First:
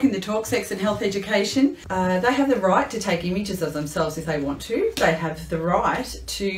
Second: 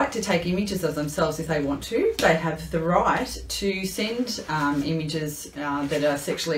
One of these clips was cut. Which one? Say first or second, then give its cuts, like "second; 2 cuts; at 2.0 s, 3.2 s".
first; 1 cut; at 1.8 s